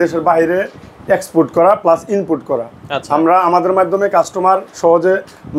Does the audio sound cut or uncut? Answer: uncut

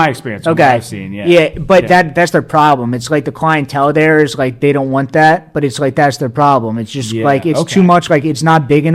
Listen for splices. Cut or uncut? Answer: uncut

